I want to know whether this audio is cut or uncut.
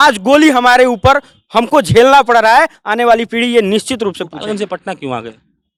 uncut